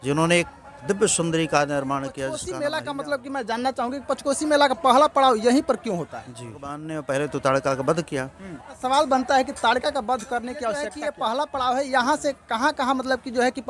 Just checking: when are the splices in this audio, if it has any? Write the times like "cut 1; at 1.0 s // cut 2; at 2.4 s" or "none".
cut 1; at 2.5 s // cut 2; at 6.9 s // cut 3; at 8.7 s // cut 4; at 10.9 s